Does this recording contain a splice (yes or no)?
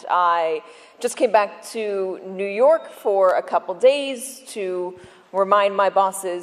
no